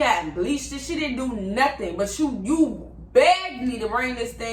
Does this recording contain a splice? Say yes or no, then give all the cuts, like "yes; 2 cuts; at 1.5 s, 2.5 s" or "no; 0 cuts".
no; 0 cuts